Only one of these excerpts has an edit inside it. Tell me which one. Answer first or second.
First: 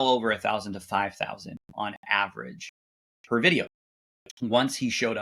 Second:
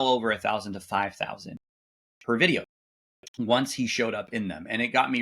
second